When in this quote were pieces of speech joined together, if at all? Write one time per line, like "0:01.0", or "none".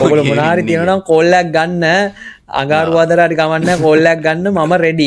none